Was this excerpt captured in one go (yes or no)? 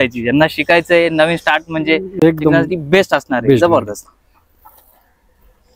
yes